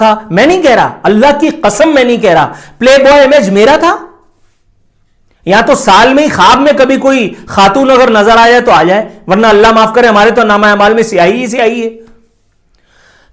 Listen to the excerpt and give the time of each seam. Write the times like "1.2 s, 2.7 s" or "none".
none